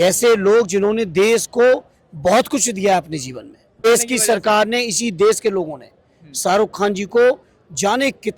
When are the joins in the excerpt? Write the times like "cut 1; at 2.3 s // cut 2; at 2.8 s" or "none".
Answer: cut 1; at 3.9 s